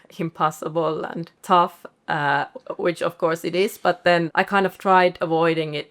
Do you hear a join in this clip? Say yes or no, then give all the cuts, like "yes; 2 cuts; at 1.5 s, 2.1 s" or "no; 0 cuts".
yes; 2 cuts; at 1.4 s, 4.3 s